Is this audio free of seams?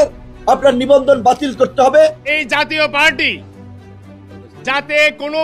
no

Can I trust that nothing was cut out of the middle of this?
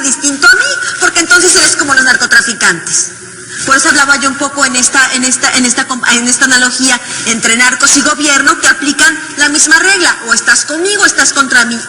yes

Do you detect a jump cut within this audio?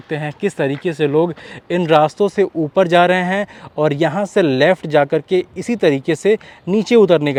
no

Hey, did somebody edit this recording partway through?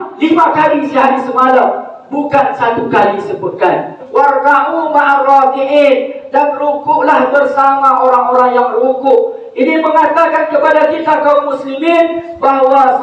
yes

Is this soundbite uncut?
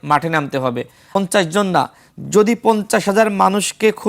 no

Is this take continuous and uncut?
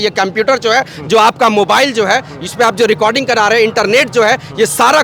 yes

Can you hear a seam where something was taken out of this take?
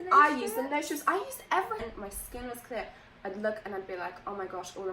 yes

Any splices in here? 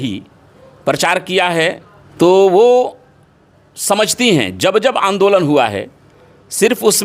yes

